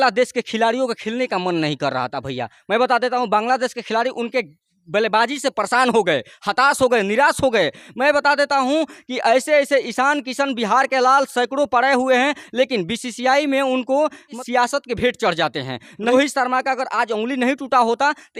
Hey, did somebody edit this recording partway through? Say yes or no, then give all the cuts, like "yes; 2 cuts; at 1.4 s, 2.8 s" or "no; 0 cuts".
no; 0 cuts